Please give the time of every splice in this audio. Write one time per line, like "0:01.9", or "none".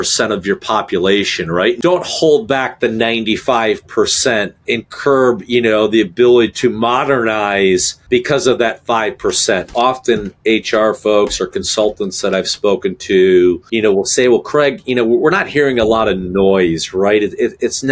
0:01.8
0:04.6
0:09.7